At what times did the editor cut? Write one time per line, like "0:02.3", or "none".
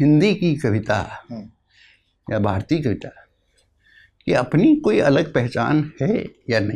none